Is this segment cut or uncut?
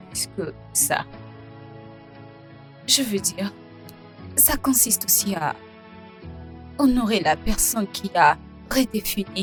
uncut